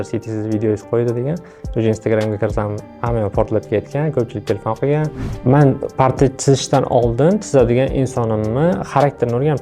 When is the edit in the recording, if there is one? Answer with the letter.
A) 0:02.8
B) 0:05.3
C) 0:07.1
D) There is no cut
B